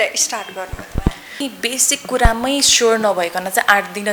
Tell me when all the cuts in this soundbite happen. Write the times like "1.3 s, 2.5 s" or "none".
1.4 s